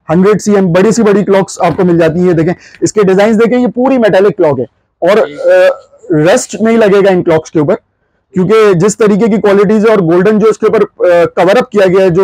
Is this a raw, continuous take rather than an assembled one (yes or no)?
yes